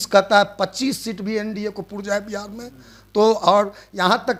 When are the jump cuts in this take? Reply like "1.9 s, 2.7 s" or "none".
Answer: none